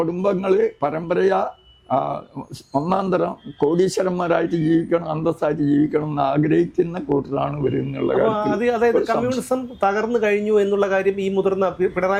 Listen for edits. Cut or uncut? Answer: uncut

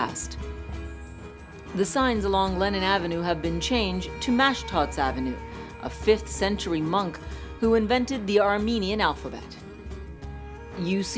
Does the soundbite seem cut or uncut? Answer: uncut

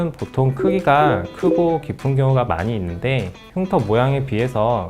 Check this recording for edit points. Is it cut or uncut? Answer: uncut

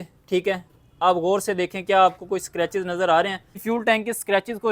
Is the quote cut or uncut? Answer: cut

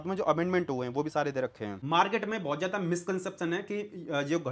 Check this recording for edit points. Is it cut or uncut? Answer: cut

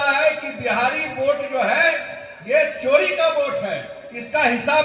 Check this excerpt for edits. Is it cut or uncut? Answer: uncut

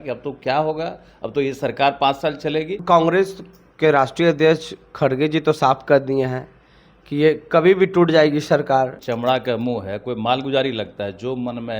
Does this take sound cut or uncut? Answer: cut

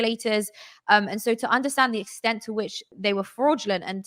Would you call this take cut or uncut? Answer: cut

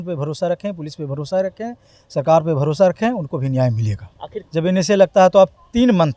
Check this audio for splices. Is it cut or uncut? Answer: cut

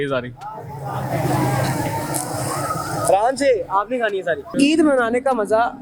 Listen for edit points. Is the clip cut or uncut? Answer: cut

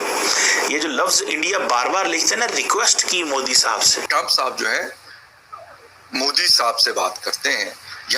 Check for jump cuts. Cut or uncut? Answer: cut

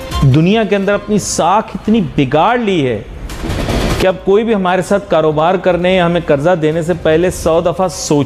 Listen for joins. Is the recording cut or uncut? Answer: uncut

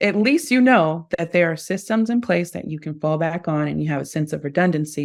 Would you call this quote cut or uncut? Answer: uncut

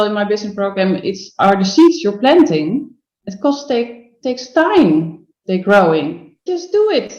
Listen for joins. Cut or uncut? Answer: cut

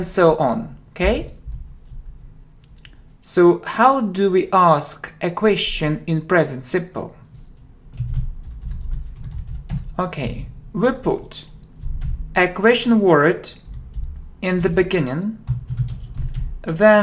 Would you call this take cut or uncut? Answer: cut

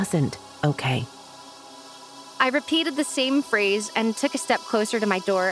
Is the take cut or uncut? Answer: cut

